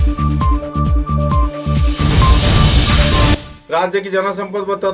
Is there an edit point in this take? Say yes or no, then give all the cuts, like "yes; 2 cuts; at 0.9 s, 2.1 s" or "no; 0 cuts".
yes; 1 cut; at 3.5 s